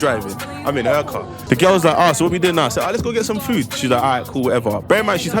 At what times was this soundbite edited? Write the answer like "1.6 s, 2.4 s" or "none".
1.3 s